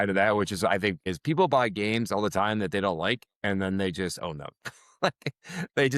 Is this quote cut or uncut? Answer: cut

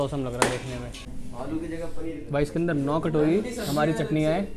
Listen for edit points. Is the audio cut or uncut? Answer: cut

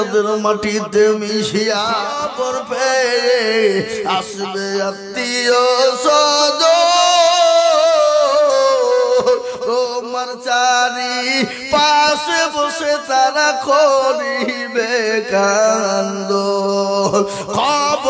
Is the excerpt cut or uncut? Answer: cut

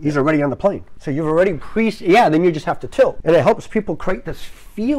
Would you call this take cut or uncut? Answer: cut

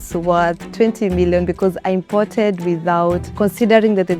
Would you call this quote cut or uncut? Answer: cut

